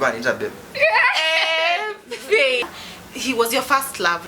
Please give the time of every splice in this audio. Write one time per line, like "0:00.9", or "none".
0:02.8